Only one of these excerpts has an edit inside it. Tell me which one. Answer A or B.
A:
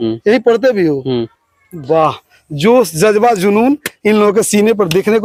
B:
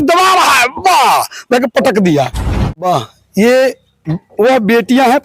B